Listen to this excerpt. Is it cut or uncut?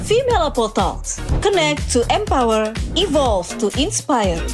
uncut